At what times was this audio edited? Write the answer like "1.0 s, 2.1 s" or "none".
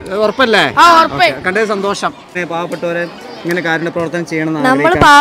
2.4 s